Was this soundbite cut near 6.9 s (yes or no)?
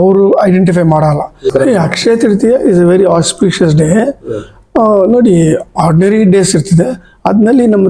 no